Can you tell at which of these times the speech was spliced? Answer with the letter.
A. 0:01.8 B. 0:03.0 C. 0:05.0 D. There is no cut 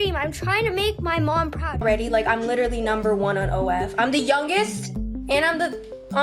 A